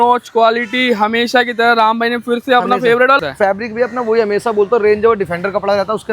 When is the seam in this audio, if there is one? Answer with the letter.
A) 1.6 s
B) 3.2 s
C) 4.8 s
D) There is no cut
B